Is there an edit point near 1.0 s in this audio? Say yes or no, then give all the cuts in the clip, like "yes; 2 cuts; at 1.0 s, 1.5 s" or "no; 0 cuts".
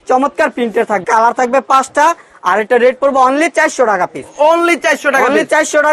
yes; 1 cut; at 1.0 s